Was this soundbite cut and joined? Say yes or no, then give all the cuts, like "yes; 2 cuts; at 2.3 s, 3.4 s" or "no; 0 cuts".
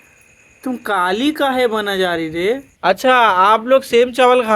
yes; 1 cut; at 2.7 s